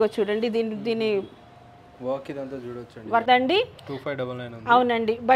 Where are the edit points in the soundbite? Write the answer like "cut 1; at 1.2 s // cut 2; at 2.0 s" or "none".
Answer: cut 1; at 3.3 s

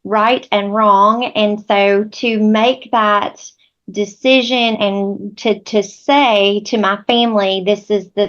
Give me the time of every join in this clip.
cut 1; at 4.7 s

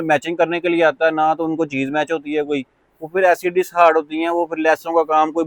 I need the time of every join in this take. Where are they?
none

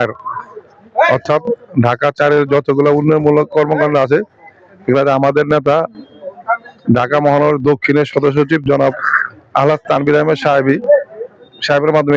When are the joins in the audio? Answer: none

